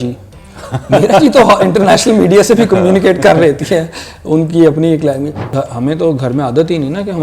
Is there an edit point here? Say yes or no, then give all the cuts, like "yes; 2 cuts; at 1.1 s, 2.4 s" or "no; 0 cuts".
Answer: yes; 1 cut; at 5.4 s